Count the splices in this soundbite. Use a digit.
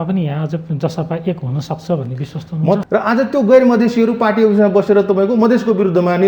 1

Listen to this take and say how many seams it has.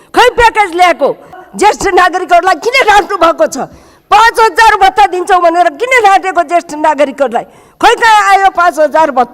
1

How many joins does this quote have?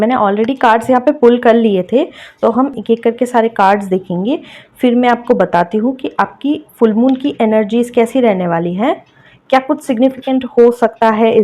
1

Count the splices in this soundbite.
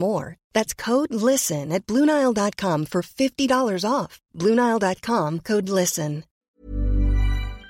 1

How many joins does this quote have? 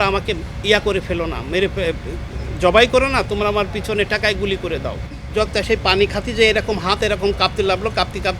1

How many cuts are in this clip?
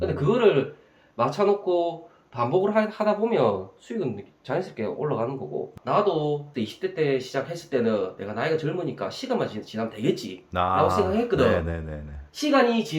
1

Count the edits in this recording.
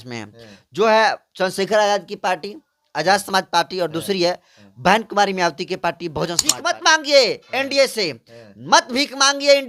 1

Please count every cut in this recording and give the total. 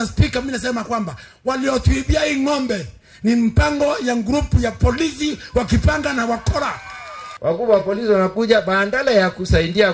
1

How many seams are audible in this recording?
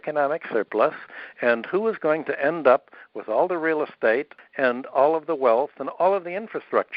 0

